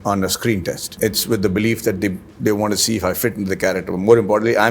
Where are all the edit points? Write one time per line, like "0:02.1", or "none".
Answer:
0:00.9